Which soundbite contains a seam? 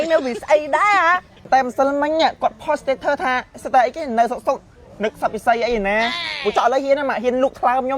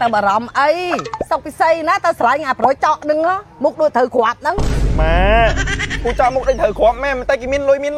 first; 1 cut; at 1.4 s

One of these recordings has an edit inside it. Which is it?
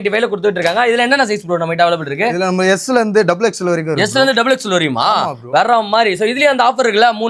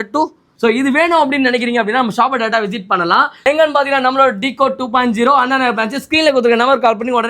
second; 1 cut; at 3.4 s

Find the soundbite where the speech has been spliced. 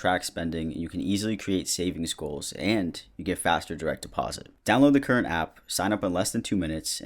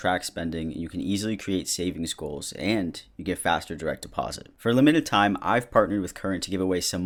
first; 1 cut; at 4.5 s

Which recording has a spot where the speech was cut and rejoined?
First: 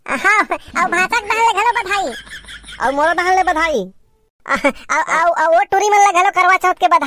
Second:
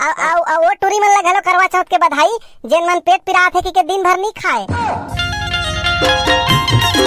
second; 1 cut; at 5.0 s

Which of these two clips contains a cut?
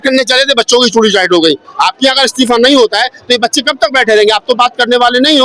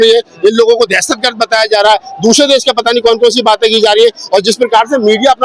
first; 1 cut; at 1.7 s

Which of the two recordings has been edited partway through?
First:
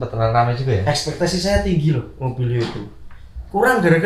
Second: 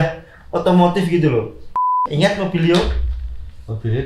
second; 1 cut; at 1.8 s

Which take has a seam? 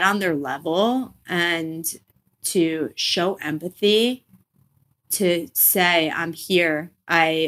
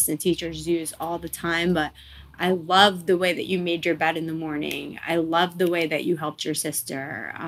first; 1 cut; at 5.0 s

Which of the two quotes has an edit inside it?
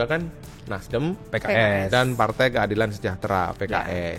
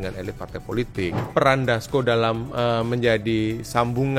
second; 1 cut; at 1.3 s

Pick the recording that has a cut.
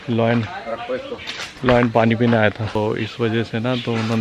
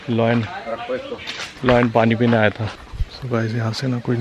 second; 1 cut; at 2.7 s

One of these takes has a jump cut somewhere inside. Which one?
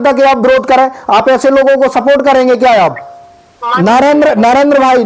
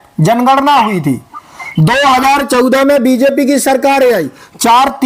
first; 1 cut; at 3.6 s

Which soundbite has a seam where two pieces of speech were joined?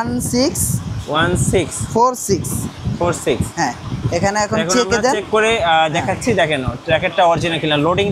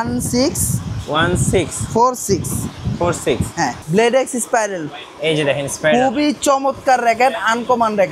second; 1 cut; at 3.8 s

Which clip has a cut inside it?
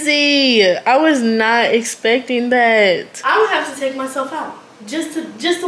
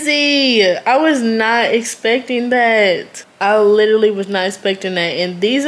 first; 1 cut; at 3.1 s

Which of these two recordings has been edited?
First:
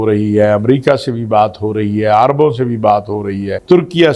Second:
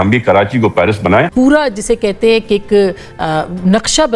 second; 1 cut; at 1.3 s

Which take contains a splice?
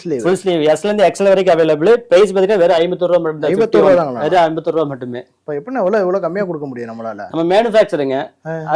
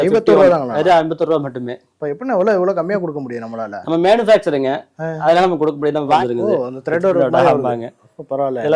second; 1 cut; at 6.2 s

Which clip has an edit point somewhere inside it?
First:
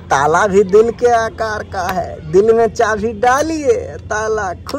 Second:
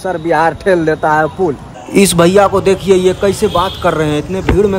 second; 1 cut; at 1.7 s

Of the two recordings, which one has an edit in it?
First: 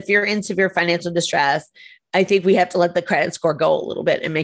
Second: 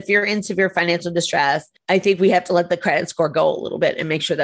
second; 1 cut; at 1.7 s

